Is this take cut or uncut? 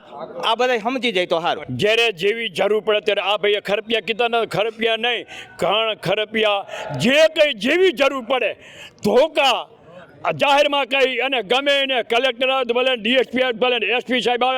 cut